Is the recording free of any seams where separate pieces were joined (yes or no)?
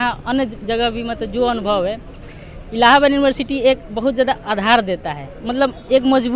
yes